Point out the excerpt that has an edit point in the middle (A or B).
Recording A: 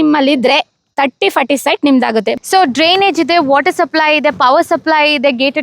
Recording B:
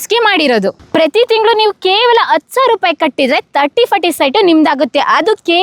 A